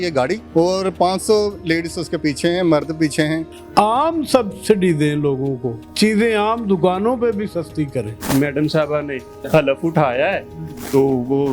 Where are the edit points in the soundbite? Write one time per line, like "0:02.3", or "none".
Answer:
0:03.4
0:08.2